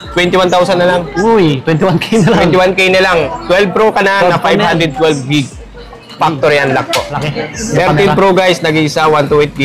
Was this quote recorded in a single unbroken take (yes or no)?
no